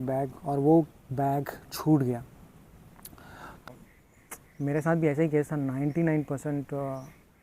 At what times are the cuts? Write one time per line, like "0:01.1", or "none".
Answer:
0:03.6